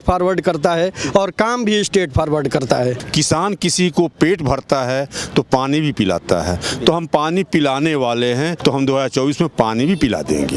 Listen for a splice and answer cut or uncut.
cut